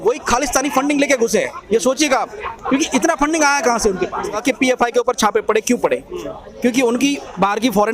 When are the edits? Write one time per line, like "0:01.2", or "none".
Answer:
0:04.4